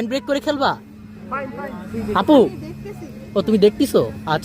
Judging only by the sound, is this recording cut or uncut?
uncut